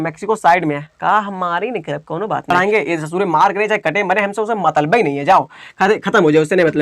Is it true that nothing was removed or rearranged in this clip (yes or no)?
no